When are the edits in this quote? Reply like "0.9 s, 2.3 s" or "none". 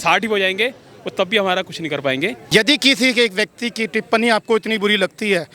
2.4 s